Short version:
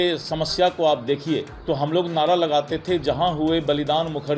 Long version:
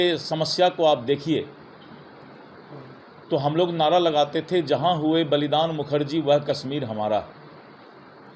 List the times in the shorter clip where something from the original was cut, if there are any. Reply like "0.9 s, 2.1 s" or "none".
1.5 s